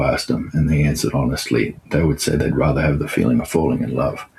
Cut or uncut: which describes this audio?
uncut